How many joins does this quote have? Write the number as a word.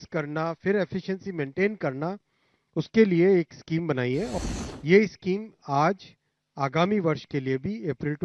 one